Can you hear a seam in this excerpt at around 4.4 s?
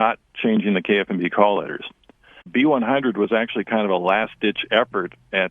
no; 1 cut; at 2.5 s

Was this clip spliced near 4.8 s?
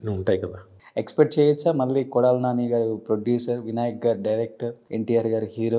yes; 2 cuts; at 0.8 s, 4.8 s

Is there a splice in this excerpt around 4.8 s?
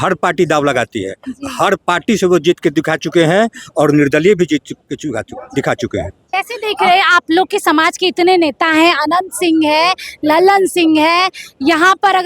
no; 1 cut; at 6.2 s

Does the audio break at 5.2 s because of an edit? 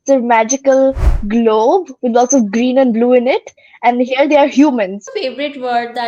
yes; 1 cut; at 5.2 s

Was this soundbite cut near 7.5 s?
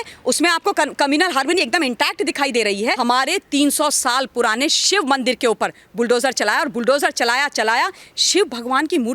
no; 1 cut; at 3.0 s

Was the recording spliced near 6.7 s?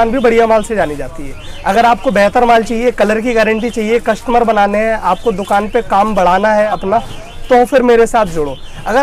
yes; 1 cut; at 6.7 s

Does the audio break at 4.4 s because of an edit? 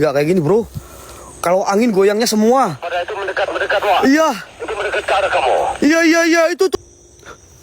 no; 1 cut; at 6.7 s

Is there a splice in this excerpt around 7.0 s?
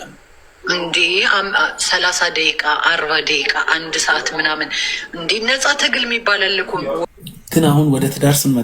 yes; 1 cut; at 7.0 s

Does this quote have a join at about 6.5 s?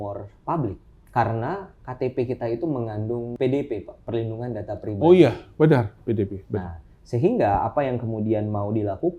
no; 2 cuts; at 0.9 s, 3.3 s

